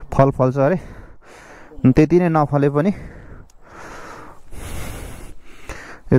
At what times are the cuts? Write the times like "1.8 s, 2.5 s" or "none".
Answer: none